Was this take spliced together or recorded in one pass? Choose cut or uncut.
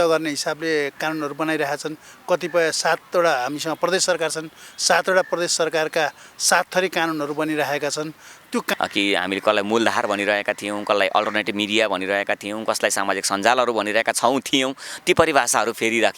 cut